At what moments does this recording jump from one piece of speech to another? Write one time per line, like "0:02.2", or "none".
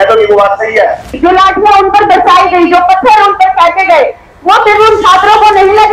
0:01.1